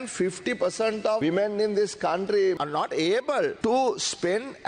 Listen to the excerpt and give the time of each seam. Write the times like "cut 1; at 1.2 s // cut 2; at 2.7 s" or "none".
cut 1; at 1.2 s // cut 2; at 2.6 s // cut 3; at 3.6 s